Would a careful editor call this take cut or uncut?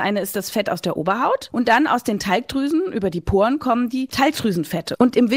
cut